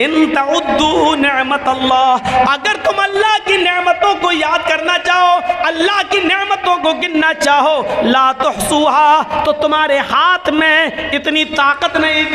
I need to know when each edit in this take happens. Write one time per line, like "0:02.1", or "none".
none